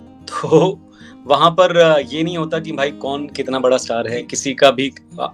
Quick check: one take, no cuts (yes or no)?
no